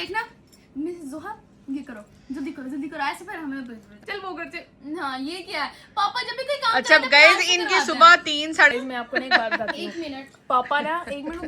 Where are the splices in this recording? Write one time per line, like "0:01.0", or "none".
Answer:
0:04.0
0:08.7